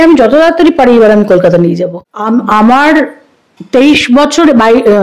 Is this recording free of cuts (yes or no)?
no